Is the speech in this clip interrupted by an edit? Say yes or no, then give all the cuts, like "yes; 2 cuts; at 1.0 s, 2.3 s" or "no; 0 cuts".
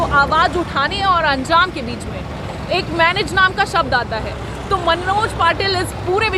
no; 0 cuts